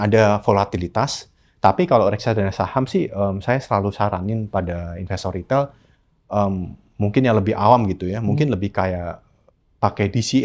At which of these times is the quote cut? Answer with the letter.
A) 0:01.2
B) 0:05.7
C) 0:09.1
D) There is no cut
D